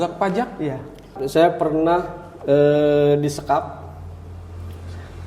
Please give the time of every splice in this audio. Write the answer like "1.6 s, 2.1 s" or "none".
1.1 s